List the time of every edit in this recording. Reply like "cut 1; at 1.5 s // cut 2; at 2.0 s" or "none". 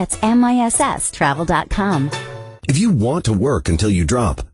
cut 1; at 2.5 s